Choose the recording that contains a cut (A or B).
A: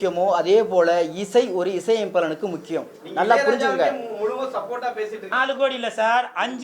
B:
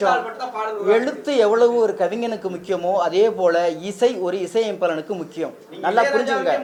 A